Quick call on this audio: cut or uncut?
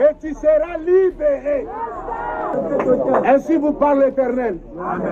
cut